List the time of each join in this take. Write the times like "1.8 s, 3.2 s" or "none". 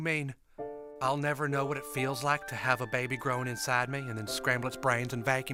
none